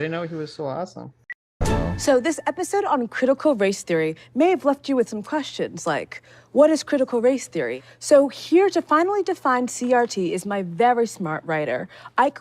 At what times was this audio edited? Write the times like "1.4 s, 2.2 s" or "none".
1.4 s